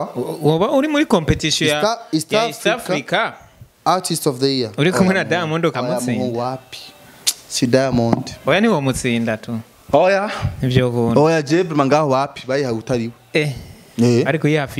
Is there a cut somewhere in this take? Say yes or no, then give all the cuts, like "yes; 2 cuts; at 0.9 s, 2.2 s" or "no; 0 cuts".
no; 0 cuts